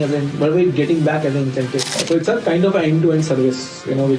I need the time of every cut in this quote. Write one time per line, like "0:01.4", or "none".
0:02.0